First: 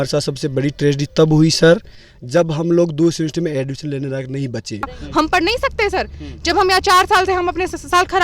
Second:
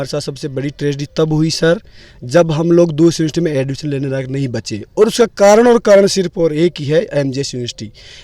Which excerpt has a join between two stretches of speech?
first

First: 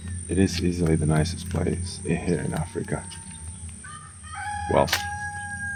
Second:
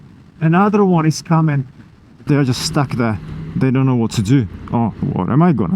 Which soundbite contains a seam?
second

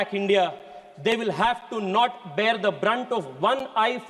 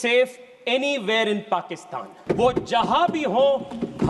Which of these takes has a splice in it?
second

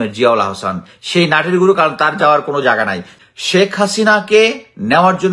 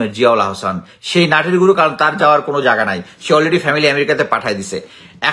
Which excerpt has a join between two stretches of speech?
first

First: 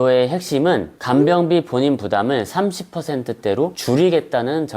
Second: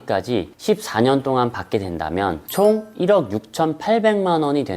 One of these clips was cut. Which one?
first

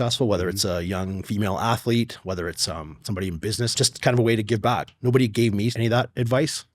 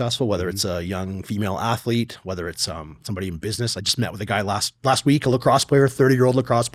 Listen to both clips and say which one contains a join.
first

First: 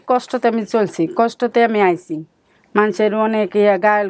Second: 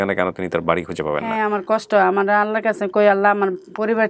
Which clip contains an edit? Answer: second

